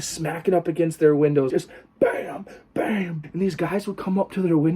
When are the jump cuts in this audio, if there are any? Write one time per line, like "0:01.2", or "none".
0:01.5
0:03.2